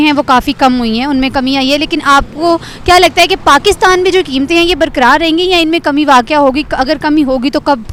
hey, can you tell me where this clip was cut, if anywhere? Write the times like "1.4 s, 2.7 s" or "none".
none